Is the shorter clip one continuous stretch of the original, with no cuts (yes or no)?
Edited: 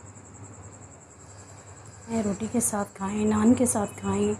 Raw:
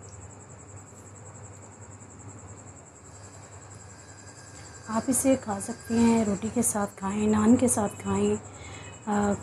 no